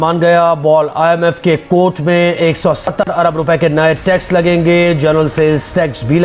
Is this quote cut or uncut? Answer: uncut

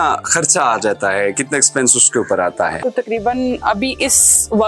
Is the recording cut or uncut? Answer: uncut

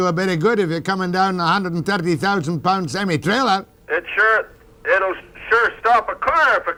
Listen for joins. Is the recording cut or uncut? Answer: uncut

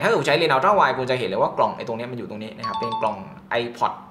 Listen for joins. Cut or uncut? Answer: uncut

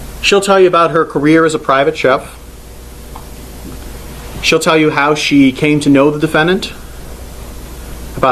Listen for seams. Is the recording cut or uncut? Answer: uncut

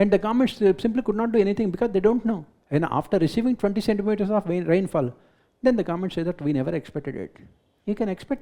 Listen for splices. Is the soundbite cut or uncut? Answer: cut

